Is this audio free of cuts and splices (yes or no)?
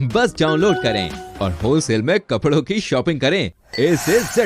yes